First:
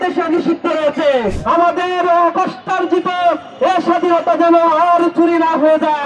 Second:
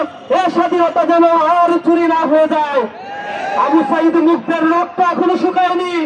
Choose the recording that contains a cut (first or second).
first